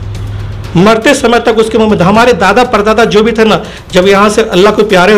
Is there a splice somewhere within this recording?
no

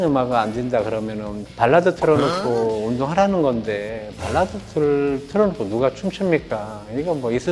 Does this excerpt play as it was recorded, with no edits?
yes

